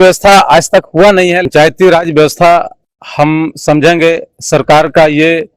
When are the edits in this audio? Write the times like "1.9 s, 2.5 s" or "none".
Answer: 1.5 s